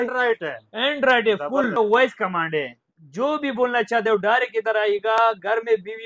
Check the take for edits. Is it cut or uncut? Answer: cut